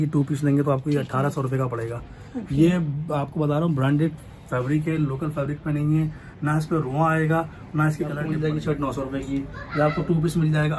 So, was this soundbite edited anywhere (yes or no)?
yes